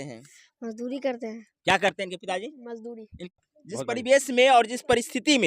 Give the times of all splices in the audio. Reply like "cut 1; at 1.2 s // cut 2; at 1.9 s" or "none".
cut 1; at 3.2 s